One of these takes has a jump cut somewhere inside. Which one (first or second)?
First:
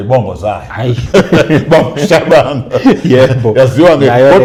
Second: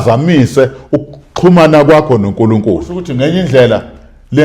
second